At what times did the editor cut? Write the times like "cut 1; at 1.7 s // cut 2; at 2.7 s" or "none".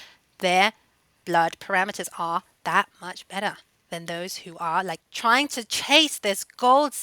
cut 1; at 5.0 s